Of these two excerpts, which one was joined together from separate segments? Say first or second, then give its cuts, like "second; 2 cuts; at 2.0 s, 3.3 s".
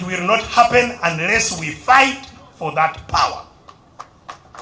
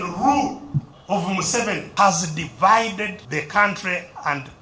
second; 3 cuts; at 0.9 s, 1.9 s, 3.2 s